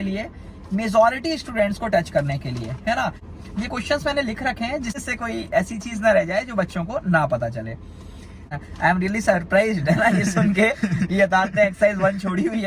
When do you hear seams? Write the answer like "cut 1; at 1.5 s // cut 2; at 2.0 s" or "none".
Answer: cut 1; at 3.3 s // cut 2; at 5.0 s // cut 3; at 8.6 s